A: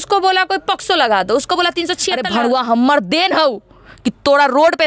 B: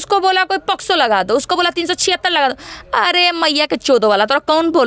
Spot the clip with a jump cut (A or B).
A